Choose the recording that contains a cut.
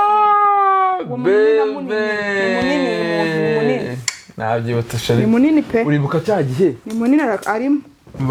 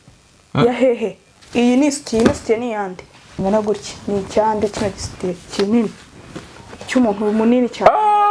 second; 1 cut; at 3.3 s

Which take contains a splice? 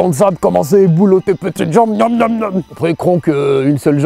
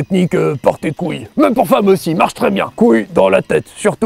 second; 2 cuts; at 1.2 s, 2.7 s

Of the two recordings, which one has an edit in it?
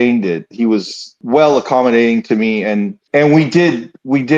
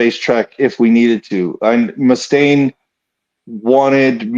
first; 2 cuts; at 1.2 s, 3.0 s

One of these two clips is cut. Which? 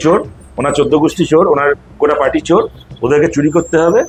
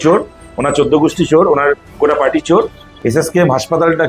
second; 1 cut; at 2.8 s

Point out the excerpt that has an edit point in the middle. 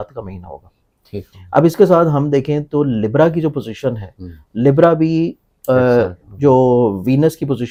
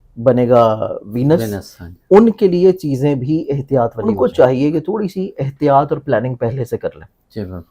second; 1 cut; at 4.1 s

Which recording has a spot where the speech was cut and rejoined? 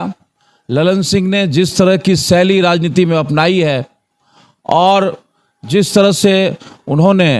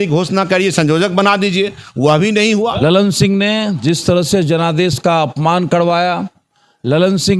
second; 1 cut; at 2.7 s

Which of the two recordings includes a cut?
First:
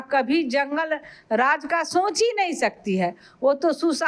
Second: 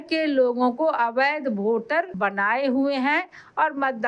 second; 1 cut; at 2.1 s

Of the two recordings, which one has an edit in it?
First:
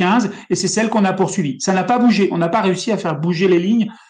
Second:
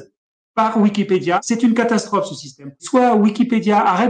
second; 2 cuts; at 1.4 s, 2.8 s

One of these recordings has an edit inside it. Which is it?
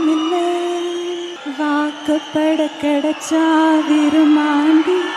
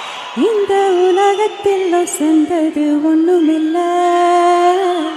first; 1 cut; at 1.4 s

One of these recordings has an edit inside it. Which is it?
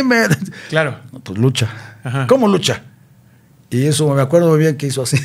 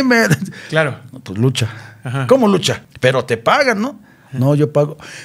second; 1 cut; at 2.8 s

